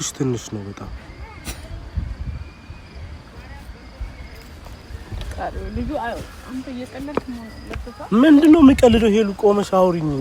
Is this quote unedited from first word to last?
yes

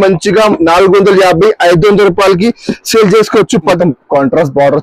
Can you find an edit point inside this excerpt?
yes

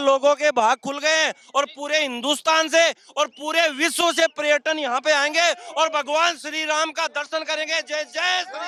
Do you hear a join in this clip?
no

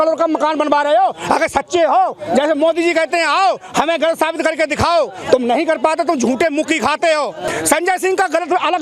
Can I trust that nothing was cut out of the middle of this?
no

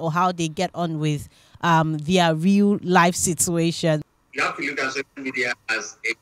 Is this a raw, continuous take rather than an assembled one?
no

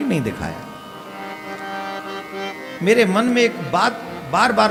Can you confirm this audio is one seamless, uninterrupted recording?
yes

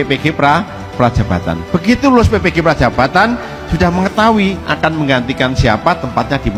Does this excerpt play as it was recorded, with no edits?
yes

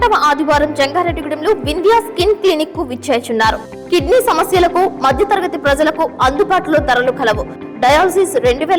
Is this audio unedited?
yes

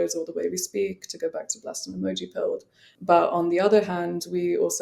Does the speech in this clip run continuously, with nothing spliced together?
no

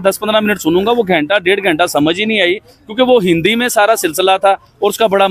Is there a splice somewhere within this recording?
no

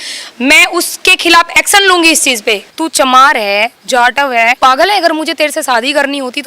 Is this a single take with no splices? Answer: no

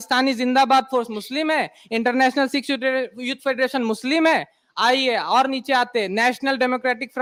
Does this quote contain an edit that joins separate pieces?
no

